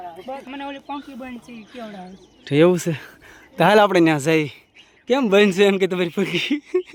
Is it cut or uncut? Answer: uncut